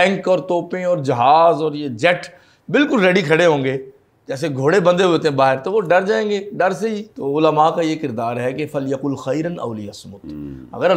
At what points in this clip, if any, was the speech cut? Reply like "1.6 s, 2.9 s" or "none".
7.1 s